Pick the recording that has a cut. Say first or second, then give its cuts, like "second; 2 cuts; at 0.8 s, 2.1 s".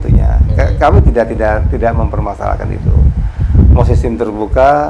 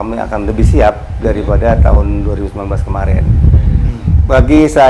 second; 1 cut; at 3.9 s